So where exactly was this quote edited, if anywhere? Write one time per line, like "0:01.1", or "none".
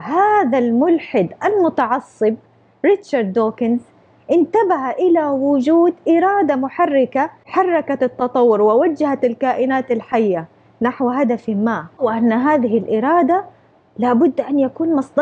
0:07.4
0:12.0